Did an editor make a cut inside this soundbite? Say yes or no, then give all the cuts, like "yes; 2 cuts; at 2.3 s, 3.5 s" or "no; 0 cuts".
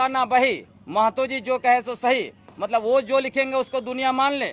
no; 0 cuts